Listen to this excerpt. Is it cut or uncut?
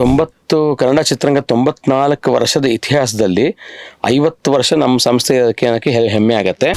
uncut